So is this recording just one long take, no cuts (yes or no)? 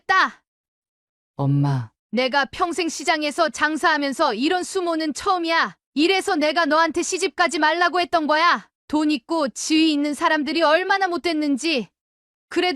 yes